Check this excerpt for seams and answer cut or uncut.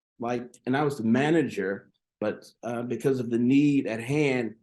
uncut